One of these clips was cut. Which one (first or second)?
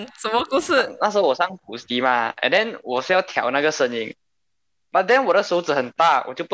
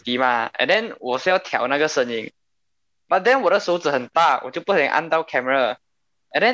first